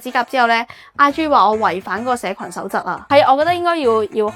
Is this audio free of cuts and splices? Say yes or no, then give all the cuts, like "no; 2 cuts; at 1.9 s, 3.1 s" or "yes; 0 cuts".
no; 1 cut; at 3.0 s